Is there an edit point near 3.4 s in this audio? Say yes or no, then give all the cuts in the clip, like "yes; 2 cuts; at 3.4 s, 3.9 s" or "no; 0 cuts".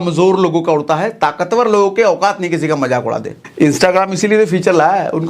yes; 1 cut; at 3.4 s